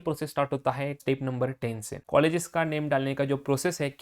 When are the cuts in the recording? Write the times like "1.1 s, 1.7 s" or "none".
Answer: 1.0 s, 1.9 s